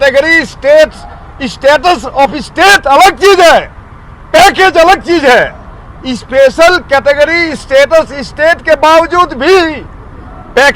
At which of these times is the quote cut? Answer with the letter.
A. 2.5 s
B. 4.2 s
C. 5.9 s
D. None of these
D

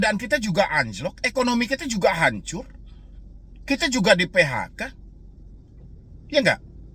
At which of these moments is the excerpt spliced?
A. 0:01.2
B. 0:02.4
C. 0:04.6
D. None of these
D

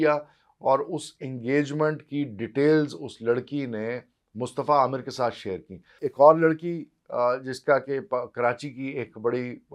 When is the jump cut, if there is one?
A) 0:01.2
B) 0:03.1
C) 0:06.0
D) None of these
C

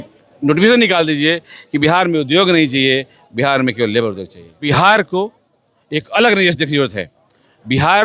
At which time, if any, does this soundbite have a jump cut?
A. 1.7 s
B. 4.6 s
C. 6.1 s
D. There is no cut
B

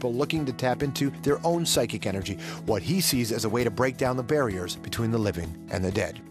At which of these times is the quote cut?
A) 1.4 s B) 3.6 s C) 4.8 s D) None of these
C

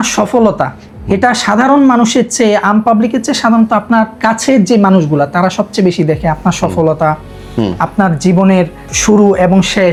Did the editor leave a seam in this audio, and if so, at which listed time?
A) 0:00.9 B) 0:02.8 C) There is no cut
C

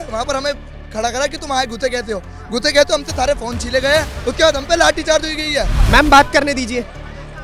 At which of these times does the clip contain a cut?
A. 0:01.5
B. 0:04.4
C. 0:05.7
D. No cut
C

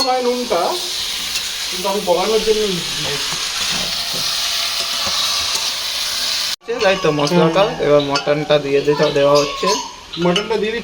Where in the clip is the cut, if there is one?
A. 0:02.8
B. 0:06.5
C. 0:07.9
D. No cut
B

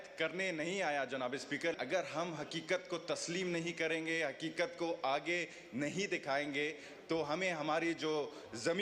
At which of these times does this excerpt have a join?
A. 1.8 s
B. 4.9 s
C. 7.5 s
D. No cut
A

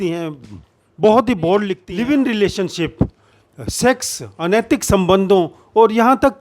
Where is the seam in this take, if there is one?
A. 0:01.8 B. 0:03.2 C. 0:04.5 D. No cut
A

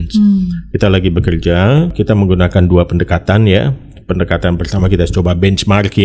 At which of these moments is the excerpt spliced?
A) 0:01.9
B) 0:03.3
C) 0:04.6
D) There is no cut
A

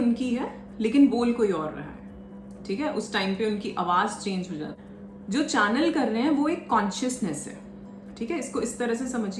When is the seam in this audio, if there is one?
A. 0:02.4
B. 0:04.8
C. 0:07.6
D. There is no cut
B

